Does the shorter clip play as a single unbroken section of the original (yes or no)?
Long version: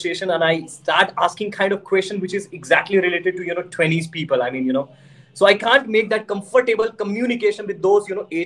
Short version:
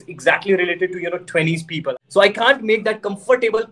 no